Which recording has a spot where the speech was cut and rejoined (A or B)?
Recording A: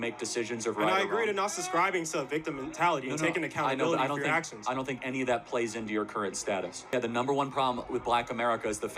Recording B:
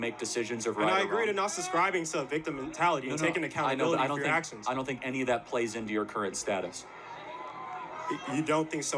A